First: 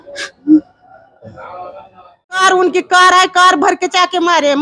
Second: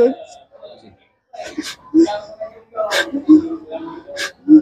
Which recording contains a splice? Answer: first; 1 cut; at 2.4 s

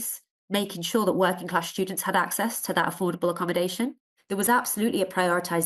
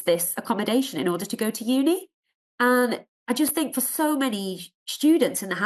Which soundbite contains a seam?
first; 1 cut; at 4.1 s

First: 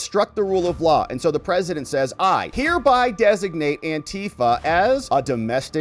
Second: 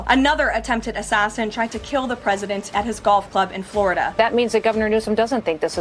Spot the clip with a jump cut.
second; 1 cut; at 4.1 s

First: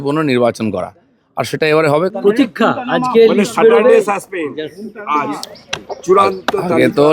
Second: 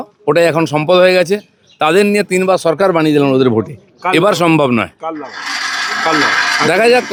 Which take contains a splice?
first; 1 cut; at 2.1 s

